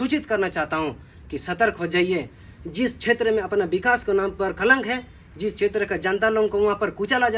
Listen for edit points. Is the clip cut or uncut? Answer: uncut